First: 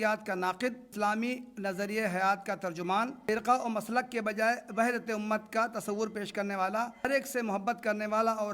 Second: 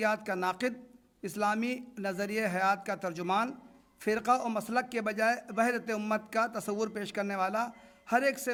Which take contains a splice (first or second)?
first